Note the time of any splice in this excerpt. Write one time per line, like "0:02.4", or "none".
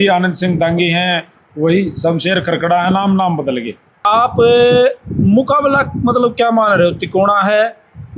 0:04.0